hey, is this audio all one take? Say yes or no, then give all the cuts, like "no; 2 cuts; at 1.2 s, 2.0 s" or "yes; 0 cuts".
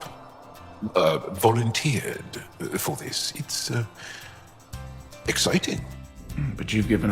no; 1 cut; at 5.9 s